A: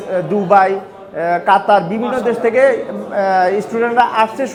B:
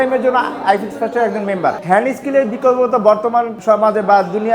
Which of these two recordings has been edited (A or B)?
B